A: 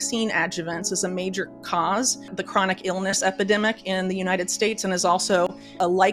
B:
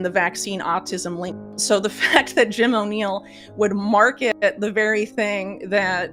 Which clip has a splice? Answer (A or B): B